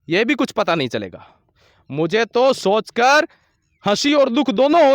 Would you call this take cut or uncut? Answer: uncut